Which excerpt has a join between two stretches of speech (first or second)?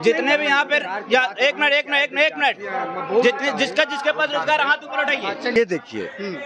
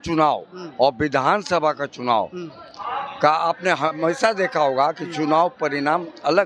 first